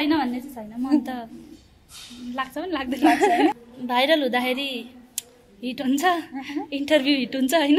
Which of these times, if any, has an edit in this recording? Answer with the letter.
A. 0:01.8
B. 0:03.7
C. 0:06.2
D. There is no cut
B